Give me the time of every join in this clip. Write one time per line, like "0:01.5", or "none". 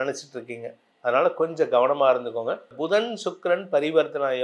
0:02.8